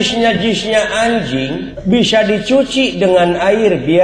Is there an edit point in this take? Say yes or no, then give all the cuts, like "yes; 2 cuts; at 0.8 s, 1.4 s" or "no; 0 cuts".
yes; 1 cut; at 1.7 s